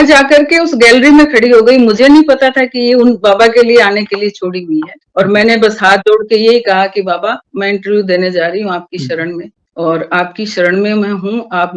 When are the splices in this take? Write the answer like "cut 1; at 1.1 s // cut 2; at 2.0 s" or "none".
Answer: cut 1; at 4.9 s